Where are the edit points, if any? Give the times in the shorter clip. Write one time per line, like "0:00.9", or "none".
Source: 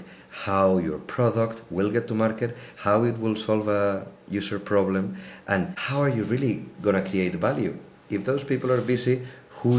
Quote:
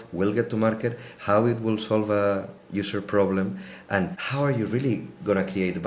none